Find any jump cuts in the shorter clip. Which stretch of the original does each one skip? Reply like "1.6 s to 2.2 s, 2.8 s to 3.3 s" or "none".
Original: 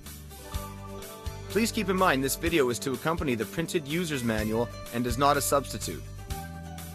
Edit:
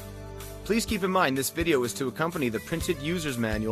none